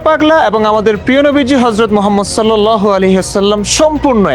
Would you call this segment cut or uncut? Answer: uncut